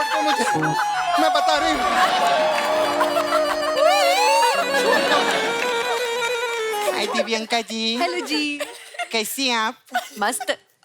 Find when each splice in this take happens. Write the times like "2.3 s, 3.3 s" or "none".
6.8 s